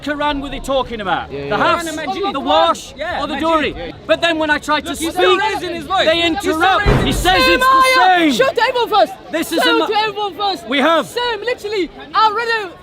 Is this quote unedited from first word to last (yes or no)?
no